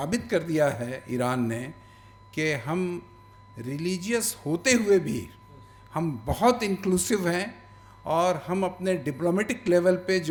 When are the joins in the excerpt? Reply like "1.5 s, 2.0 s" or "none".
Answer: none